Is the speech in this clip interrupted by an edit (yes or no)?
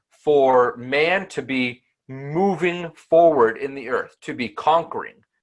no